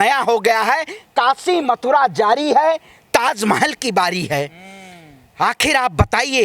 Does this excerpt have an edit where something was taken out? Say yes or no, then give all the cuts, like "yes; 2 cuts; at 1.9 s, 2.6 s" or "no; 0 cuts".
no; 0 cuts